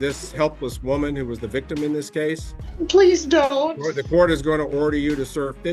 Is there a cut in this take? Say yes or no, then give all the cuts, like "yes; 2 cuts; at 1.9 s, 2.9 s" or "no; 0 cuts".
yes; 1 cut; at 2.6 s